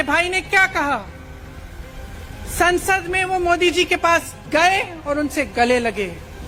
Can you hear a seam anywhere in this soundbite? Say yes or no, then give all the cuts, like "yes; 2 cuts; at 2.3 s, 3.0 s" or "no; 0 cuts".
no; 0 cuts